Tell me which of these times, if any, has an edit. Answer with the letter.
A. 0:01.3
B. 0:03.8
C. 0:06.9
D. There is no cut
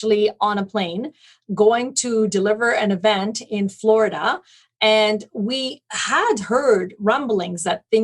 C